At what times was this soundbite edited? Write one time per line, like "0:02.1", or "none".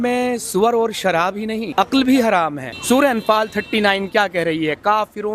0:01.7
0:02.7